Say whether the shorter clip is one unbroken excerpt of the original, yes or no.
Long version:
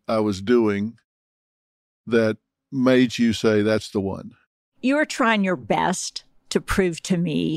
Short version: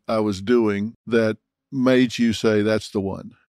no